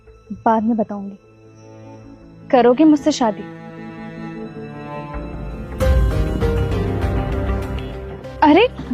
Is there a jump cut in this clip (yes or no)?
no